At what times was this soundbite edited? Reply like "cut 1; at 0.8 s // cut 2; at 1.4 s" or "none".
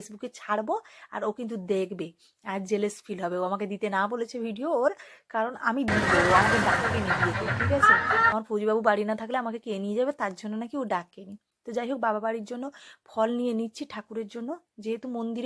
none